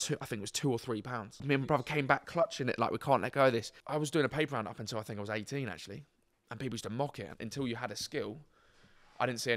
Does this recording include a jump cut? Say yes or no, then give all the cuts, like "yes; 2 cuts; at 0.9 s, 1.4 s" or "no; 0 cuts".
yes; 3 cuts; at 1.4 s, 3.8 s, 7.4 s